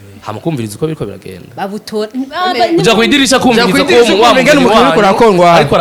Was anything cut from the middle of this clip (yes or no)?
no